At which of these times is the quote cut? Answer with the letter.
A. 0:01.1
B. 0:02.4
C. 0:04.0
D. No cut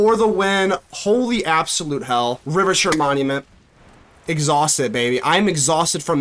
B